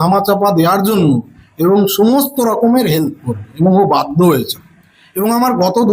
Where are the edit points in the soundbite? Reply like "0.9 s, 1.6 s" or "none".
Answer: none